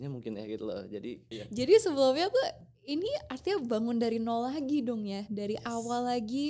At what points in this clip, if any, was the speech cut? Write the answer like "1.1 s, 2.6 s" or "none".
1.3 s